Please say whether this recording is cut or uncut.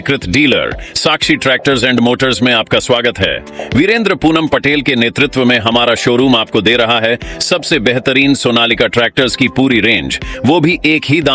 uncut